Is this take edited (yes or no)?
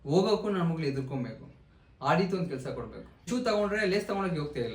yes